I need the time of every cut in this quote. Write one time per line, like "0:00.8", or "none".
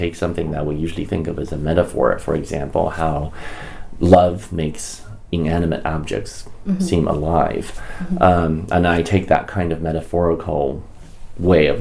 none